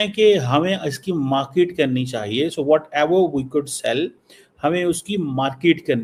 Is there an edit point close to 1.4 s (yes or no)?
no